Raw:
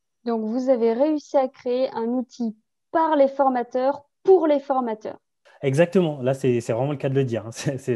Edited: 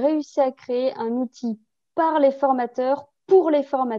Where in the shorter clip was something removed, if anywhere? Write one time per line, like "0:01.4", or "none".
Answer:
none

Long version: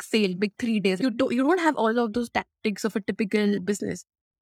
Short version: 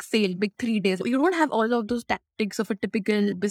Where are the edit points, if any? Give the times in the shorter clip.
0:01.0

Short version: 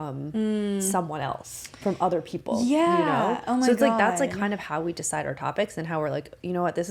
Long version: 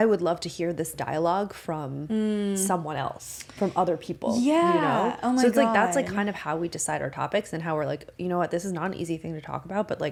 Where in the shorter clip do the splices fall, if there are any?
none

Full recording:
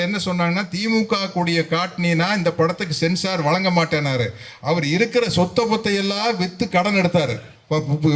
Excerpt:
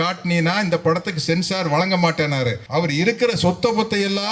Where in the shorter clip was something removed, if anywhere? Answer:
0:02.6

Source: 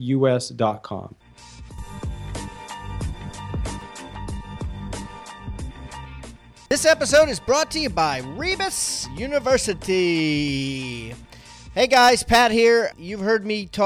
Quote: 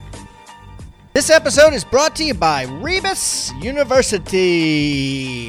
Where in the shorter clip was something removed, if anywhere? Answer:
0:00.9

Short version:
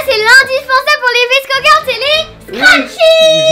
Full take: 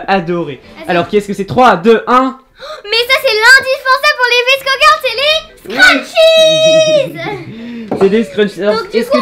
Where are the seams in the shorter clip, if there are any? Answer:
none

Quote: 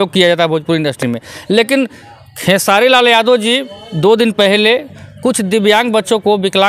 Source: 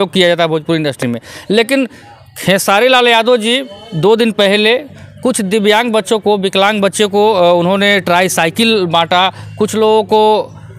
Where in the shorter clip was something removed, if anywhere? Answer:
none

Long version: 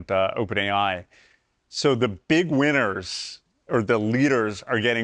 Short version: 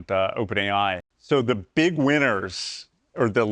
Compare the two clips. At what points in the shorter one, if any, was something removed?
0:01.1

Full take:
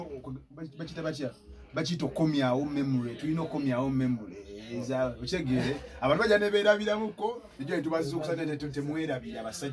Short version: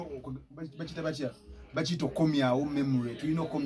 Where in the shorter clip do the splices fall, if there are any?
none

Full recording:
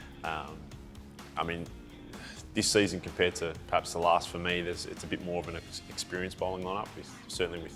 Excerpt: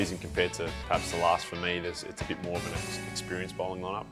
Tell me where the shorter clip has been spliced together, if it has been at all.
none

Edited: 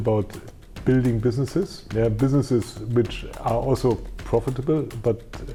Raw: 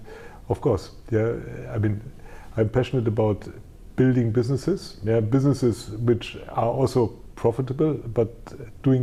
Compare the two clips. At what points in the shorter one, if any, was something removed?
none

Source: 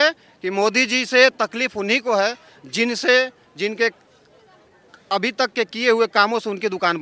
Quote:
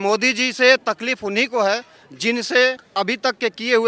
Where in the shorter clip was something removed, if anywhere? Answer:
0:02.8

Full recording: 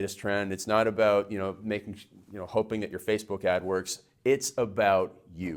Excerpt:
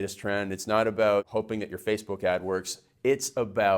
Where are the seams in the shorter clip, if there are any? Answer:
0:01.3

